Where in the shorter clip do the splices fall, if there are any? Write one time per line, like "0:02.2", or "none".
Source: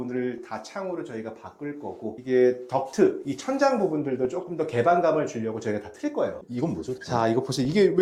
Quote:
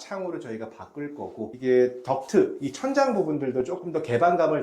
none